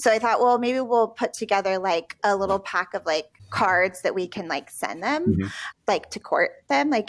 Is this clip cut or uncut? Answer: cut